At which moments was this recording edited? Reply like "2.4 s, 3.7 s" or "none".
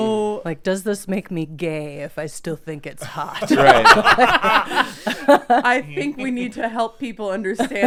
none